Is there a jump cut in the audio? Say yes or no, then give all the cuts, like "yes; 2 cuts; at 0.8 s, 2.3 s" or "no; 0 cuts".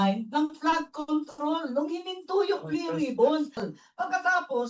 yes; 1 cut; at 3.7 s